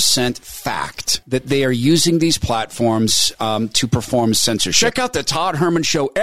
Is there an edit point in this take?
yes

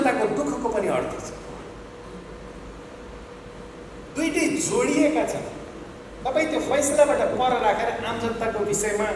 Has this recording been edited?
no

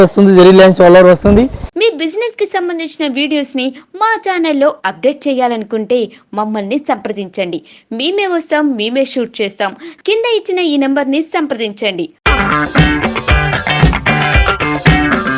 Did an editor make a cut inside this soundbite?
yes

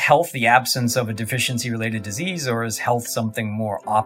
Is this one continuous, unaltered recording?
yes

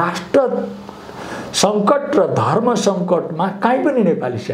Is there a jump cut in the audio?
no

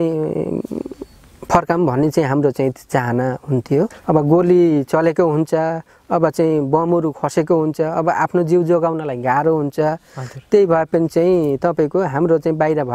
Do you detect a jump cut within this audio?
yes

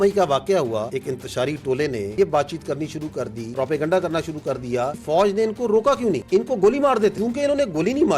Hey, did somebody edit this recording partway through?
yes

